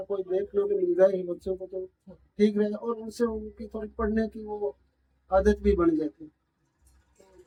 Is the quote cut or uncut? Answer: uncut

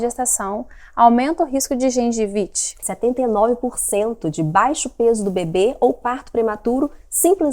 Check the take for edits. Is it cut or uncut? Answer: cut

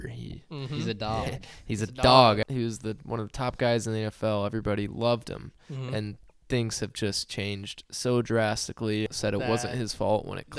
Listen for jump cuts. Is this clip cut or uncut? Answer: cut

